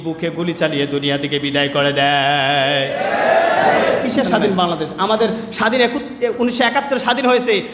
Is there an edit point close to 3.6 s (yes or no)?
yes